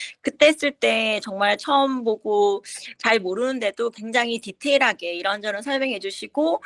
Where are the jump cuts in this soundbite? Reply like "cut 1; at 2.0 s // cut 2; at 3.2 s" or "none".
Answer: none